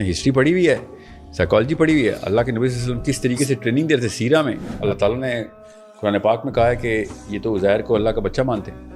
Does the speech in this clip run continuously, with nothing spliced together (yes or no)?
no